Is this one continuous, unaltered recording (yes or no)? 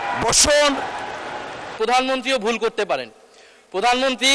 no